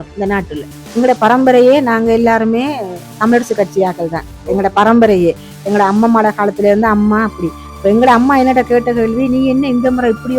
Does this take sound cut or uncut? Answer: cut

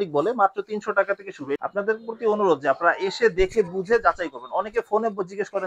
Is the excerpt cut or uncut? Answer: cut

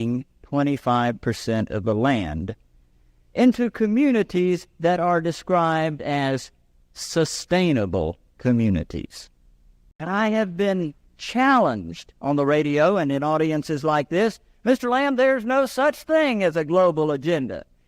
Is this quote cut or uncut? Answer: cut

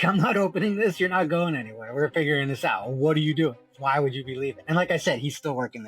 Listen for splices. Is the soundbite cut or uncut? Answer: cut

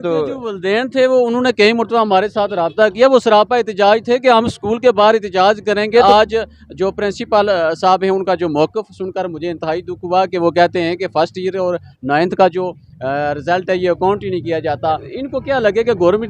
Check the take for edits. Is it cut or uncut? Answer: cut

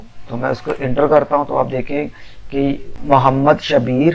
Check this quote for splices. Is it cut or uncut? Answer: cut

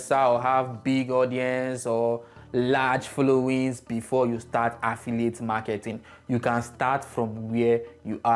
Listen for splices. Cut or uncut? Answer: uncut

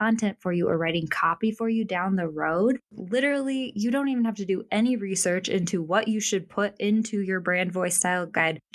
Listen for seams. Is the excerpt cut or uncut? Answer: cut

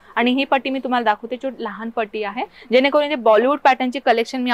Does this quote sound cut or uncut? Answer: uncut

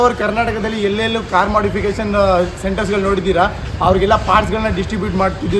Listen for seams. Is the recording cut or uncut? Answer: uncut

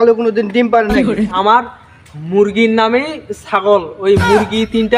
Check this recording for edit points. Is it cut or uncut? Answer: cut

